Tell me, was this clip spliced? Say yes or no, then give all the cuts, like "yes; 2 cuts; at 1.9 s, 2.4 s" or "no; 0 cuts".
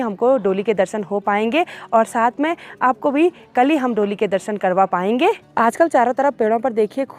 no; 0 cuts